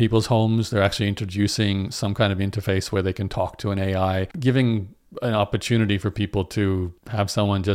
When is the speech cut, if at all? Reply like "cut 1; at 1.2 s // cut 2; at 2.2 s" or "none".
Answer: cut 1; at 4.3 s